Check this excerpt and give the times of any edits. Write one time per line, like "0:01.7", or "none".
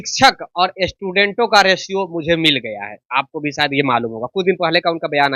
none